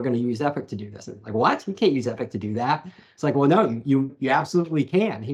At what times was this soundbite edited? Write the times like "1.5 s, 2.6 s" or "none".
4.1 s